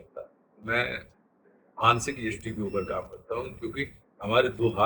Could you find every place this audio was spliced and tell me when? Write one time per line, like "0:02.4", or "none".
none